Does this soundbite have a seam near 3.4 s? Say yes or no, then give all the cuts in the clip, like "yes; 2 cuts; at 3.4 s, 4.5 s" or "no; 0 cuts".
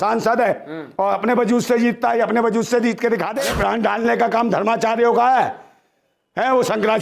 yes; 1 cut; at 3.4 s